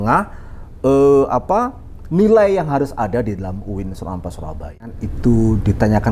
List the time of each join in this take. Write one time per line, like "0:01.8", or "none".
0:05.1